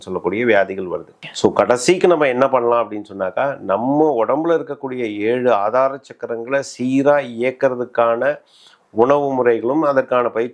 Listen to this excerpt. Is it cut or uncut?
cut